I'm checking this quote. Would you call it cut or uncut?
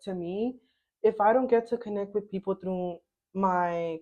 uncut